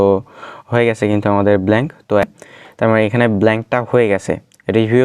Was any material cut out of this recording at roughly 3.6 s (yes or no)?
no